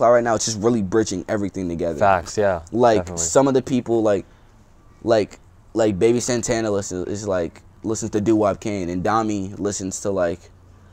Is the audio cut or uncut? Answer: uncut